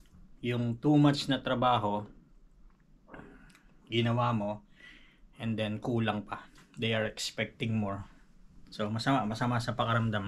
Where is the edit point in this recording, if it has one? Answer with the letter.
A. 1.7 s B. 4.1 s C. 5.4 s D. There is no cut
D